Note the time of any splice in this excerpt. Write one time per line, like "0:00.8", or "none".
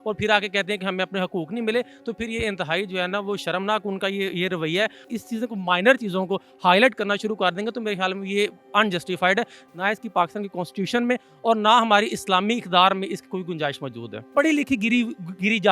0:05.0
0:09.6
0:14.3